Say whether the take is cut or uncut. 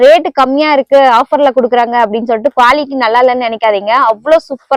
uncut